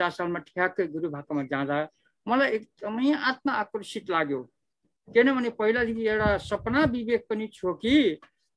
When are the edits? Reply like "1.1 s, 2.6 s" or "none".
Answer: none